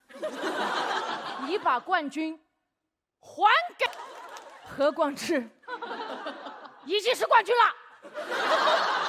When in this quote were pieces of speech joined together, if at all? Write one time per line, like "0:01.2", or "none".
0:03.9